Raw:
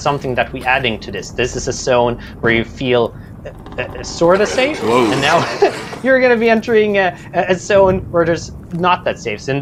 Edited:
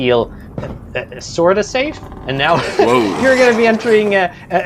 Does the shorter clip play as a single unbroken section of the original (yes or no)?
yes